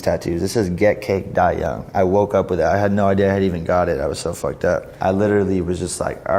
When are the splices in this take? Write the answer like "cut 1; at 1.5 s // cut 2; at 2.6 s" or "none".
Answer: none

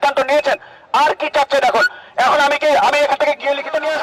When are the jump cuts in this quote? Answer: none

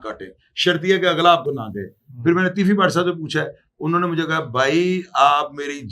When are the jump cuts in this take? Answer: none

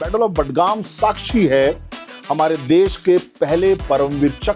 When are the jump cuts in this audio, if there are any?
none

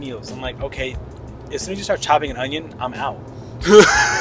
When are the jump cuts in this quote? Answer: none

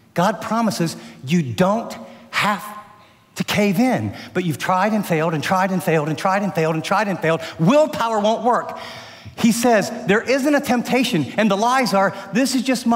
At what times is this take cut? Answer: none

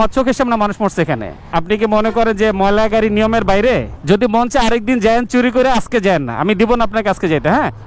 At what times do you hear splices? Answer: cut 1; at 1.5 s // cut 2; at 3.9 s

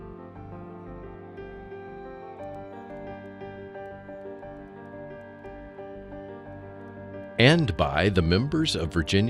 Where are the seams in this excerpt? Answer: cut 1; at 7.4 s

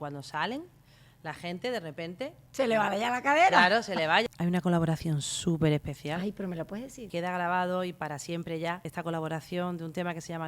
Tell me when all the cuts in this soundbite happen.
cut 1; at 2.4 s // cut 2; at 4.2 s // cut 3; at 7.1 s // cut 4; at 8.9 s

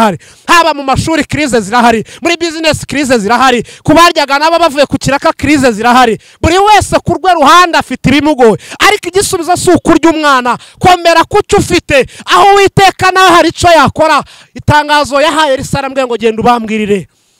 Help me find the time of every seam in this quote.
none

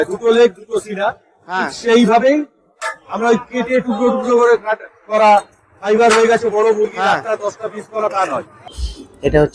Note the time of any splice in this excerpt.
cut 1; at 8.5 s

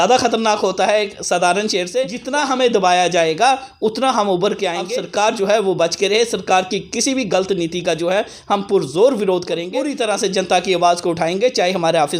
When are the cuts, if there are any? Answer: cut 1; at 2.2 s // cut 2; at 4.9 s // cut 3; at 9.8 s

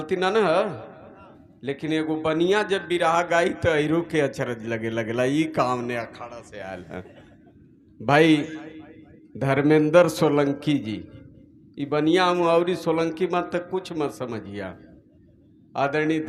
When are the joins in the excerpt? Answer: none

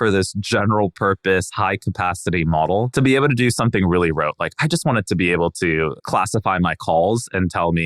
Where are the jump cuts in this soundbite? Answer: cut 1; at 2.9 s // cut 2; at 6.0 s

